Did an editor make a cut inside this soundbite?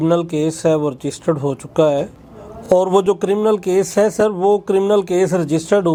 no; 0 cuts

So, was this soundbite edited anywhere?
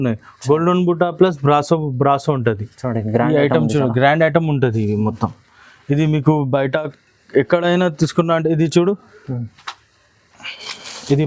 no; 0 cuts

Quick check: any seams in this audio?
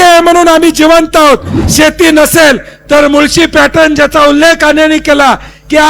yes; 1 cut; at 1.5 s

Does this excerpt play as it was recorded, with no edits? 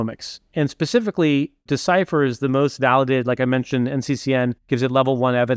no; 1 cut; at 4.6 s

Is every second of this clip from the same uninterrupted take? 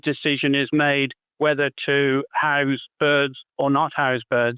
no; 1 cut; at 3.4 s

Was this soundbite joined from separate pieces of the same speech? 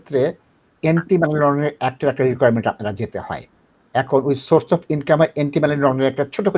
no; 0 cuts

